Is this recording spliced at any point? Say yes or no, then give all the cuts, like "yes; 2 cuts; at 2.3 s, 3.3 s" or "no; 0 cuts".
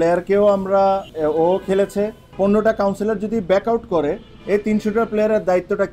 yes; 2 cuts; at 1.1 s, 2.2 s